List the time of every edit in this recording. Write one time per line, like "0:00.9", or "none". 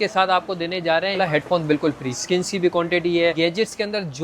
0:01.2
0:02.2
0:03.4

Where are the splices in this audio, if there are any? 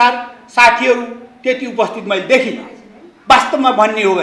none

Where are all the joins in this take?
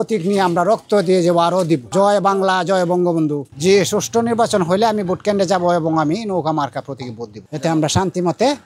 0:01.9
0:03.5
0:07.4

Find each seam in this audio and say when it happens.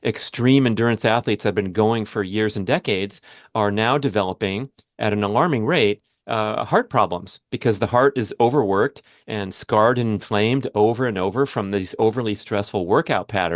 none

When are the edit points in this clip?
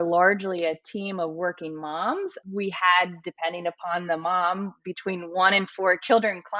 0:02.4

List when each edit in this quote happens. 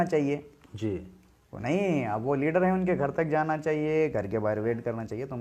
none

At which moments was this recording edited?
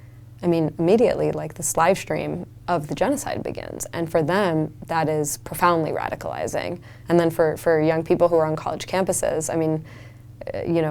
none

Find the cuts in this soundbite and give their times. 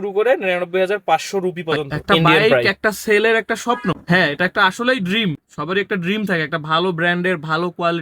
0:02.6

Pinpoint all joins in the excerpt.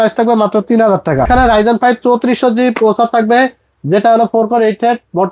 0:01.3

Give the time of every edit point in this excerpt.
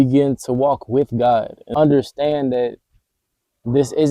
0:01.6

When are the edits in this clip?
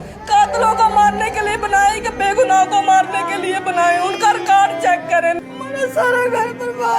0:05.4

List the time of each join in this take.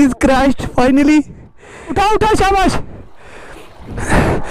0:01.9

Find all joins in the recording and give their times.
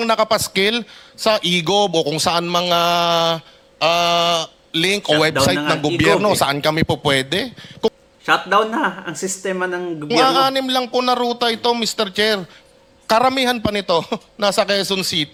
none

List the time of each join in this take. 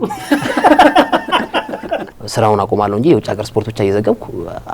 0:02.0

